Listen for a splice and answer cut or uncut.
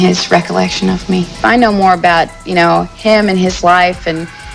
cut